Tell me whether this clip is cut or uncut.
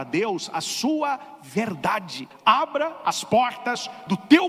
cut